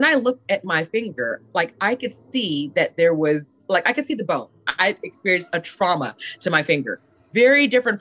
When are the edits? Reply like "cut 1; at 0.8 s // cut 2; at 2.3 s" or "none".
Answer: cut 1; at 4.7 s